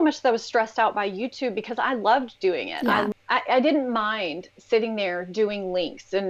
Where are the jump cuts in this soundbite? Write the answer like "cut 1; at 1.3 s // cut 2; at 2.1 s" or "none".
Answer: cut 1; at 3.1 s